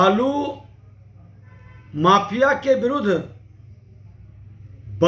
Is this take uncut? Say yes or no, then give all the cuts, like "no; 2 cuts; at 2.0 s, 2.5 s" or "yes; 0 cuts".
yes; 0 cuts